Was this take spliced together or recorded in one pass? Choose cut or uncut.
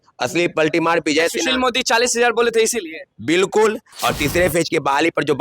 cut